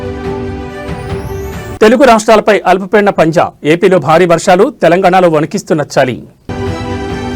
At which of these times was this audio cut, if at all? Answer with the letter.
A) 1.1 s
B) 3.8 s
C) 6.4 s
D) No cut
C